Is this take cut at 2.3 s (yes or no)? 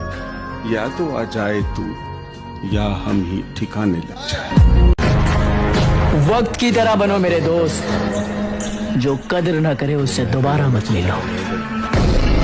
no